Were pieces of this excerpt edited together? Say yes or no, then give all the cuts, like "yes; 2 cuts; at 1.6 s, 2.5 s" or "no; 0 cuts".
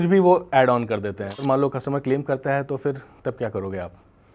yes; 1 cut; at 1.4 s